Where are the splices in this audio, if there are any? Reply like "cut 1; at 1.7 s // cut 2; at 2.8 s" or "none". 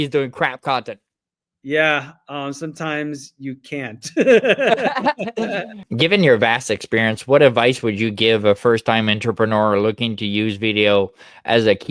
cut 1; at 5.8 s